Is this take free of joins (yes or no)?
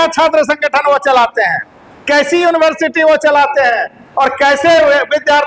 yes